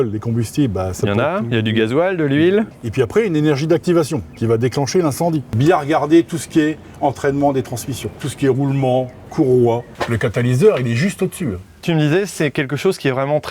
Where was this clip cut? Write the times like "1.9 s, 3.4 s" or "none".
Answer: 2.7 s, 5.5 s, 8.2 s, 9.9 s, 11.8 s